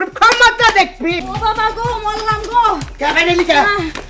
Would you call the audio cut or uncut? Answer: cut